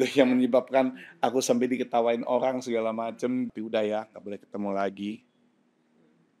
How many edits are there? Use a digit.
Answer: 1